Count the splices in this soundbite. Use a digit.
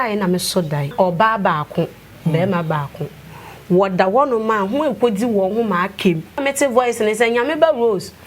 2